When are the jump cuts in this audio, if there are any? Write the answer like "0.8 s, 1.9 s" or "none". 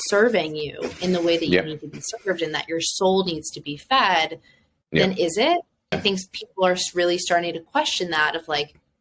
6.0 s